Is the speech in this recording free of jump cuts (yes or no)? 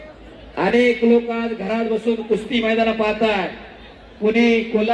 yes